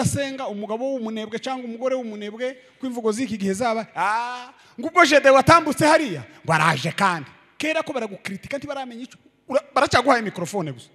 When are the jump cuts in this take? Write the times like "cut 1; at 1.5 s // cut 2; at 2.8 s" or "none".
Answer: none